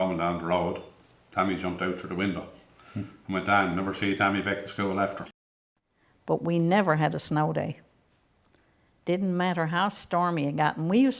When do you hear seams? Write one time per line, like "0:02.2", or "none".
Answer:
0:05.3